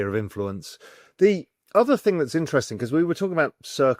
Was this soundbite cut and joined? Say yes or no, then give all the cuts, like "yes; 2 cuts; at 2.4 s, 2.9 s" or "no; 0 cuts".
no; 0 cuts